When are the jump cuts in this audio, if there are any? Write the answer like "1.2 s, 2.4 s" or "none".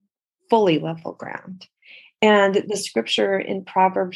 none